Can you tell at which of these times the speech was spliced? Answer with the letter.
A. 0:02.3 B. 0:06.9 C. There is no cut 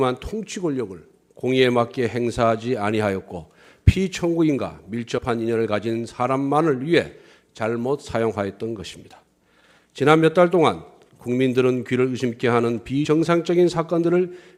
C